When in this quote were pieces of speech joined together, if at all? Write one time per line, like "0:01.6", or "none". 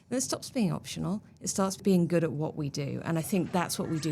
0:01.8